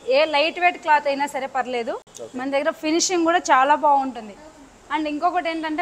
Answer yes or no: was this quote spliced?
no